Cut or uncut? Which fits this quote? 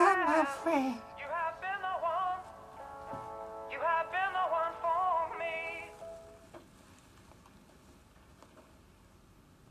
uncut